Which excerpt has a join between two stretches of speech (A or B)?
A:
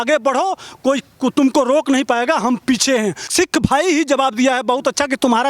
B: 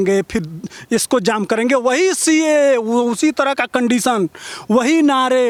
A